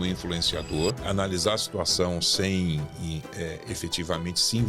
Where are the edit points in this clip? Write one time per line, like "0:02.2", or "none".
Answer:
0:01.0